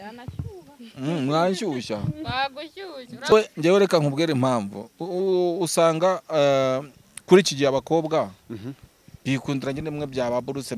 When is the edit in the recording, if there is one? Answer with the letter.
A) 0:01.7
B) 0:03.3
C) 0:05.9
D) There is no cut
B